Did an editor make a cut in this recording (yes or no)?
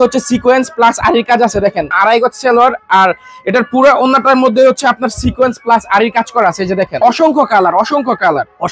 no